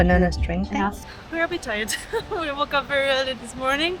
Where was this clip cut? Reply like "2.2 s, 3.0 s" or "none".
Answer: 1.1 s